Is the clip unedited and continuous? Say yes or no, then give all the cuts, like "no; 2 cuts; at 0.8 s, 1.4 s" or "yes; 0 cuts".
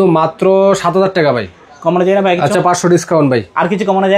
yes; 0 cuts